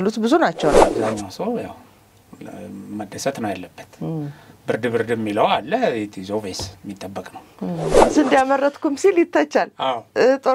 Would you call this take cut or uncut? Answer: cut